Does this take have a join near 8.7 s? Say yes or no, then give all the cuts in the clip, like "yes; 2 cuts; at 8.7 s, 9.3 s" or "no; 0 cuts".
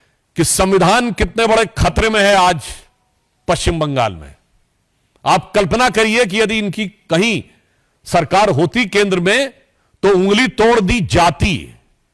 no; 0 cuts